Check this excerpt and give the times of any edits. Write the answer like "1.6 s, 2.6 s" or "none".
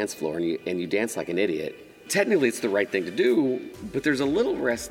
2.1 s